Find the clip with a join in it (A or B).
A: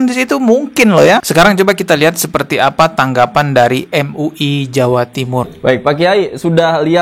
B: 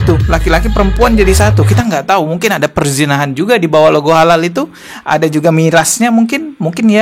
A